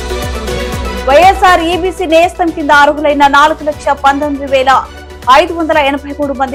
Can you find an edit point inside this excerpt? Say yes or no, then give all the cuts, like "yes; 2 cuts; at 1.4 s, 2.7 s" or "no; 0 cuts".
no; 0 cuts